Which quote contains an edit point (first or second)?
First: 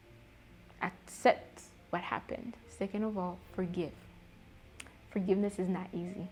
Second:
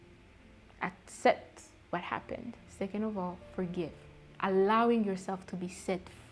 second